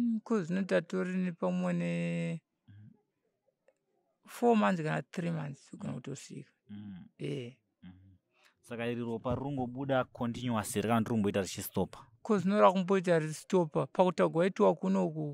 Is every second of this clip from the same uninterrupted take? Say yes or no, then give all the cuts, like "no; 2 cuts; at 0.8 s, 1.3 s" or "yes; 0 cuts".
yes; 0 cuts